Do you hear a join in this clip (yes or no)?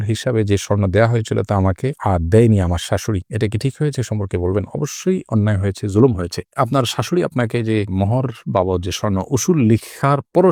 no